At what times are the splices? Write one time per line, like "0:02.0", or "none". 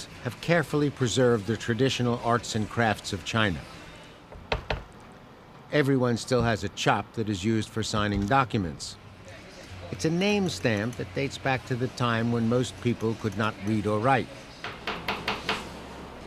0:07.2